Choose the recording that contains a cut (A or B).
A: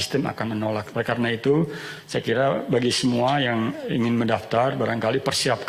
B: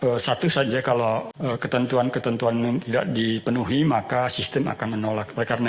B